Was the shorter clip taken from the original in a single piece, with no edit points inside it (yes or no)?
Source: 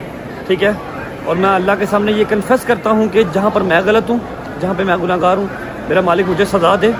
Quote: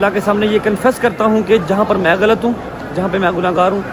yes